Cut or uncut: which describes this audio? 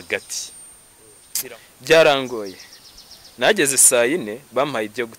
cut